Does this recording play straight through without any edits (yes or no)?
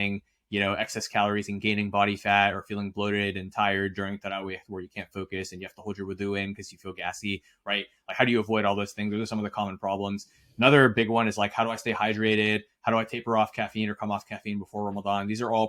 yes